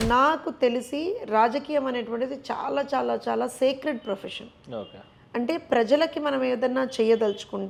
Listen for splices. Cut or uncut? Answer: uncut